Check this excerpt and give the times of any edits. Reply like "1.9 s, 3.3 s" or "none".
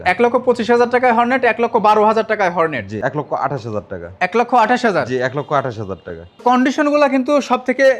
2.9 s, 6.4 s